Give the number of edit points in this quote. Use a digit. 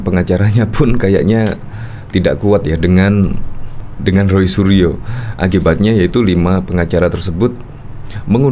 0